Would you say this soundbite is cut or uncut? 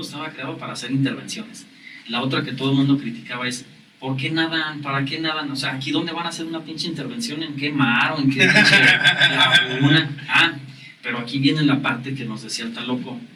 uncut